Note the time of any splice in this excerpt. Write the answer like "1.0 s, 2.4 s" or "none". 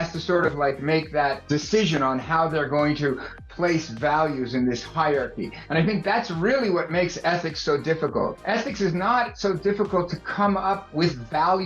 1.4 s